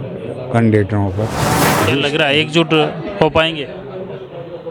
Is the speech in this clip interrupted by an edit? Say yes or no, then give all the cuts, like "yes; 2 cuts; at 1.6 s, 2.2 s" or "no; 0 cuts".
yes; 1 cut; at 1.8 s